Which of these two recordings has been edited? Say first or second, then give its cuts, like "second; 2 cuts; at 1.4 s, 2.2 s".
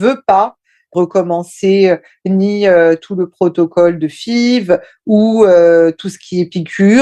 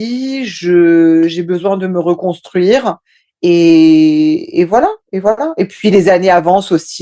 first; 1 cut; at 0.9 s